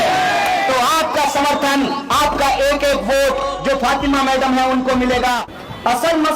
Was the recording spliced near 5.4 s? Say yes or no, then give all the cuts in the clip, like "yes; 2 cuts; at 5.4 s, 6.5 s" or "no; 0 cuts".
yes; 1 cut; at 5.4 s